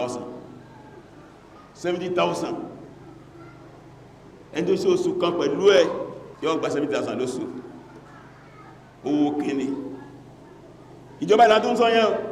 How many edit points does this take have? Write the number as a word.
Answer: one